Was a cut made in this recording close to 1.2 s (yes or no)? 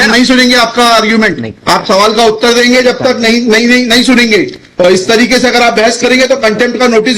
yes